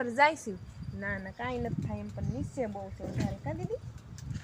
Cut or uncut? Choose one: uncut